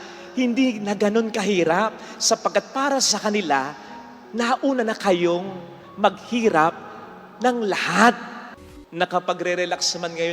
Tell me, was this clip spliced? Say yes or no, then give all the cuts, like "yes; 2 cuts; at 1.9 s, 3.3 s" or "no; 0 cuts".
yes; 1 cut; at 8.6 s